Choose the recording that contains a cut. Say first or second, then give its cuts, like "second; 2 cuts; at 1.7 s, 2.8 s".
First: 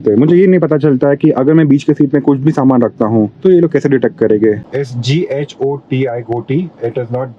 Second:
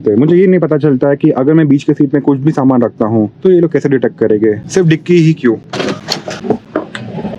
first; 1 cut; at 4.6 s